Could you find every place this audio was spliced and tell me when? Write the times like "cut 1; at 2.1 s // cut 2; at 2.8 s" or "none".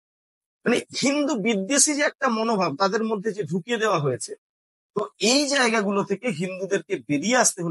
none